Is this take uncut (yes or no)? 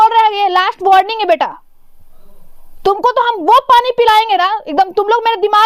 yes